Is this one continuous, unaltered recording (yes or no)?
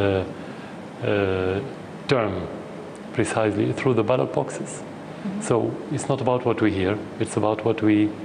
yes